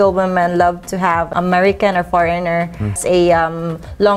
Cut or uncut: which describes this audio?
cut